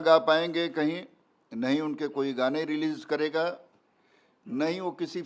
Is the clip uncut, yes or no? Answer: yes